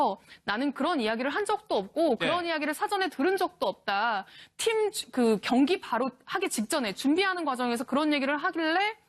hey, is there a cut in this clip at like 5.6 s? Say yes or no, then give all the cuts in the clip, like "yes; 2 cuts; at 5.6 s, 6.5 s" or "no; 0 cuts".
yes; 1 cut; at 5.6 s